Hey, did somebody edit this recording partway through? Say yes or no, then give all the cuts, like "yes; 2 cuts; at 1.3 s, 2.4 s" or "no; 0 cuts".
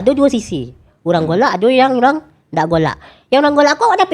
no; 0 cuts